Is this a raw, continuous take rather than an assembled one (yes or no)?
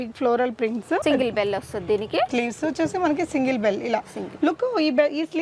yes